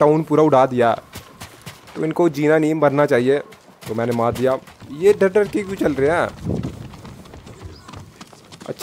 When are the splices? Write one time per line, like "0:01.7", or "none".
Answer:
0:04.8